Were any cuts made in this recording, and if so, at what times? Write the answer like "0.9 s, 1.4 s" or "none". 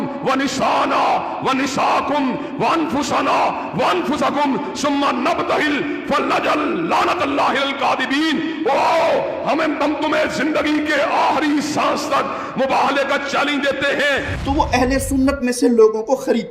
14.3 s